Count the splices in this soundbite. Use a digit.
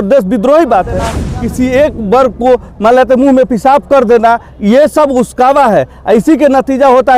1